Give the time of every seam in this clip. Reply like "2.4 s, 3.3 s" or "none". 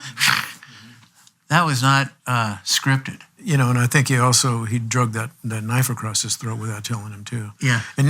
3.3 s